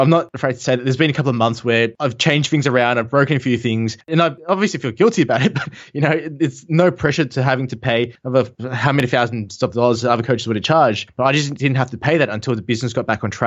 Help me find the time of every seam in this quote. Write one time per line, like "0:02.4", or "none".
none